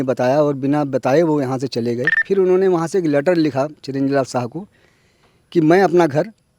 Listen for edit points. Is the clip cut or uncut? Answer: cut